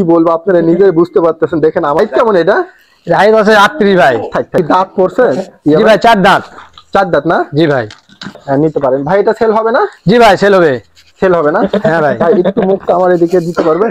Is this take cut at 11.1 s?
no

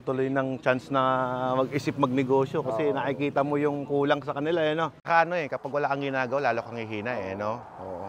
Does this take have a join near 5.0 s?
yes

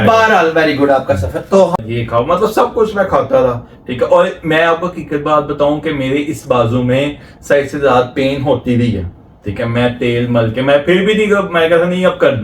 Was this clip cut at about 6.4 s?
no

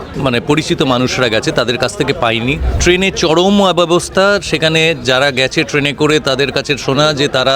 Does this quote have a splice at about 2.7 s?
yes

